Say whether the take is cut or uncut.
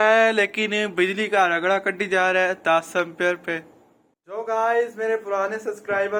uncut